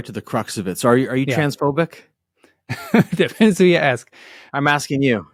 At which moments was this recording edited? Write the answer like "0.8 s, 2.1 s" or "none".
none